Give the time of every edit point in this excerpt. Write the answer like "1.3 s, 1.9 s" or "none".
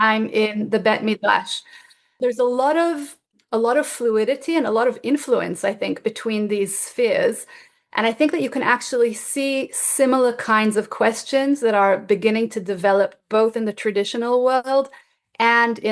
2.1 s